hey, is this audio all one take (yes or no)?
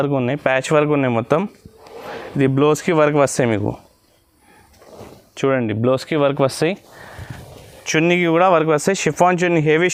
yes